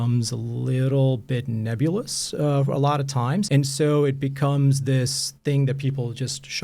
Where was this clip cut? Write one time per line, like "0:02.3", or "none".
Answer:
0:03.5